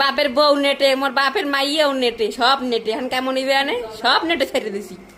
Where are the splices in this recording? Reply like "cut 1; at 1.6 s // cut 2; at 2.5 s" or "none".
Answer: none